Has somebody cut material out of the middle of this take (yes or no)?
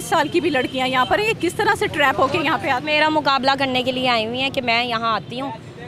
no